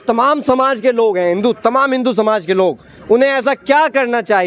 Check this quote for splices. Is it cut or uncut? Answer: uncut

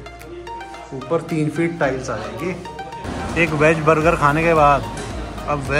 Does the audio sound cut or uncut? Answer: cut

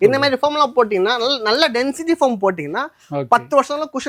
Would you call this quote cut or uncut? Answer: uncut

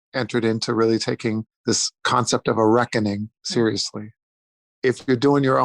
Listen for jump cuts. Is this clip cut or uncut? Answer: cut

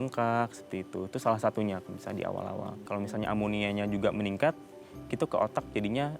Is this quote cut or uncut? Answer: cut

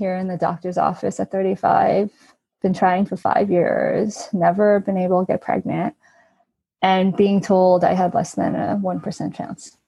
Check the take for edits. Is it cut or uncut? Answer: uncut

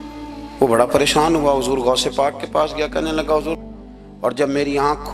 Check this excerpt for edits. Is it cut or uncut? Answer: cut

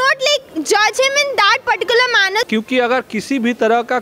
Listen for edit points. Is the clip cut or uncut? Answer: cut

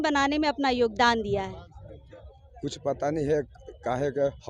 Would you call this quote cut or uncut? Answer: uncut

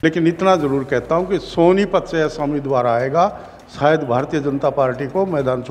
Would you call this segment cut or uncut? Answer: uncut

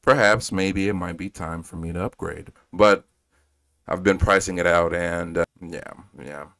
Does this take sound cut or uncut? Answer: cut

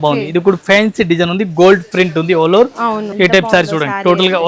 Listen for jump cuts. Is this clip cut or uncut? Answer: cut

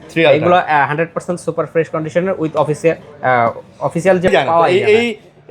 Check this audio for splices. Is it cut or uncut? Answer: cut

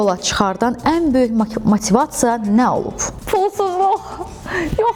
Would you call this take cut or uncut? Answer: uncut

